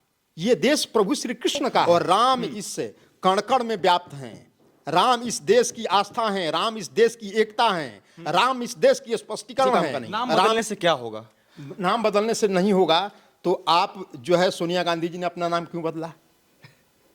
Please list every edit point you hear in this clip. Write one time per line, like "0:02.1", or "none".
0:01.8
0:10.5